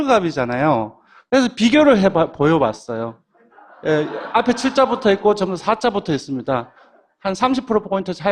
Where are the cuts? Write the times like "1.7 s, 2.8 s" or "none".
none